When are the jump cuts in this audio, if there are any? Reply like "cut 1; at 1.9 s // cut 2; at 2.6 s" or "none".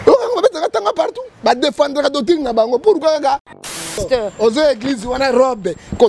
cut 1; at 3.7 s